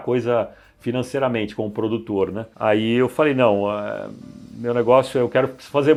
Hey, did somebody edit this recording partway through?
no; 0 cuts

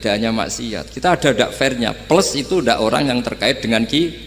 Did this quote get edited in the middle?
no; 0 cuts

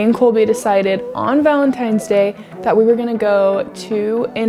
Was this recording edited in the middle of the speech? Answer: no; 0 cuts

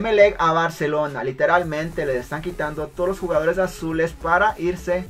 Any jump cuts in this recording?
no; 0 cuts

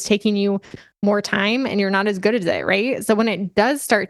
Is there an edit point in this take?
no; 0 cuts

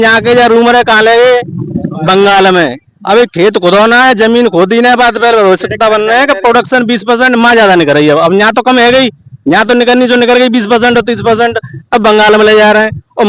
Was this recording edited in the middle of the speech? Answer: no; 0 cuts

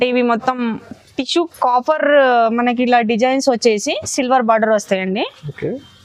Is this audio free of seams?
yes; 0 cuts

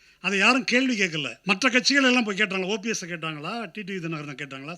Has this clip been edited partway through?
yes; 1 cut; at 1.3 s

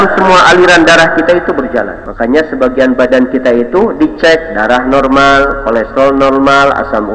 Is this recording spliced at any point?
yes; 1 cut; at 2.0 s

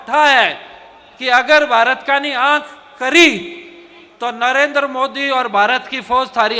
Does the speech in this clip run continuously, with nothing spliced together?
yes; 0 cuts

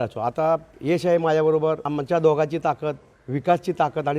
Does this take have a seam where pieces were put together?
yes; 1 cut; at 1.9 s

